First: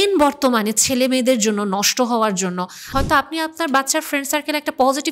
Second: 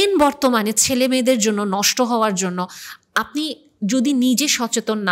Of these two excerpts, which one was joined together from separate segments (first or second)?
first